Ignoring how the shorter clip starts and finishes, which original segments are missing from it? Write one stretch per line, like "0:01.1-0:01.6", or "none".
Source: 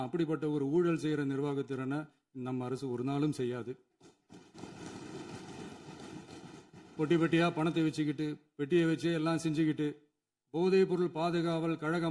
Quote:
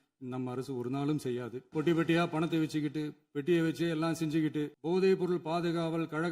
0:03.7-0:06.8
0:10.0-0:10.4

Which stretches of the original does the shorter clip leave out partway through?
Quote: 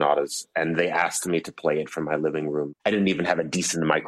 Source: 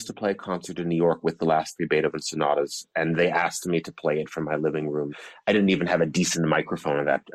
0:05.1-0:05.4

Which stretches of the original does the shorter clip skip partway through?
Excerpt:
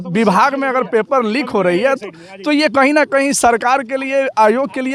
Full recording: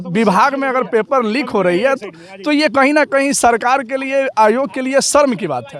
none

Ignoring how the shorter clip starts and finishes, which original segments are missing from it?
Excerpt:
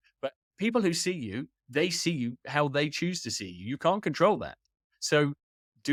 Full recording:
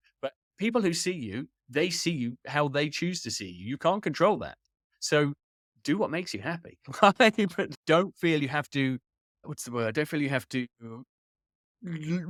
none

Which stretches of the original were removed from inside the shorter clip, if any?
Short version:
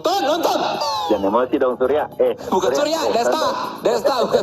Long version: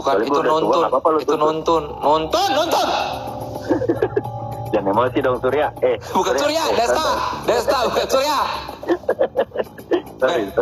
0:03.2-0:04.5

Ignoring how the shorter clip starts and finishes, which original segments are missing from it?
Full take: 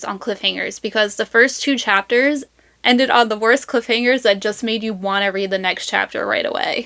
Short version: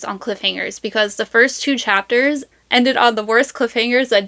0:02.5-0:02.7

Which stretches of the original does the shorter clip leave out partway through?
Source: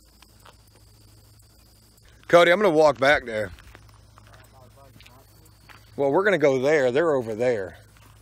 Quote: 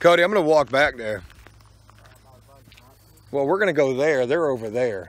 0:05.5-0:05.9

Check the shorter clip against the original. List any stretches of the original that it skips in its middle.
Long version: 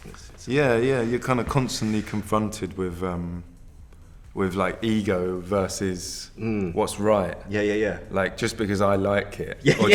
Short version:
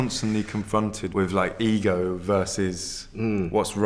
0:02.6-0:04.3

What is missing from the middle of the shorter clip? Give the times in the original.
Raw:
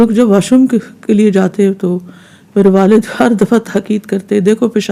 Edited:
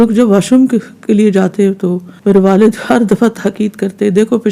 0:02.1-0:02.4

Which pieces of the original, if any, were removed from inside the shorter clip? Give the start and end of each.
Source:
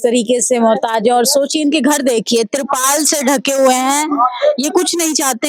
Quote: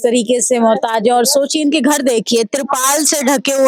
none

